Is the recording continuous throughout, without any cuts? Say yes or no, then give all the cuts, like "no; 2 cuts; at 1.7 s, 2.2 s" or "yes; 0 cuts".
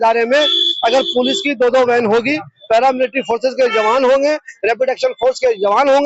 yes; 0 cuts